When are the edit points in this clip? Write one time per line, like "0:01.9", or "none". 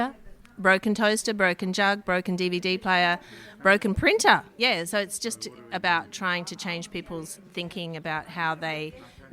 0:04.5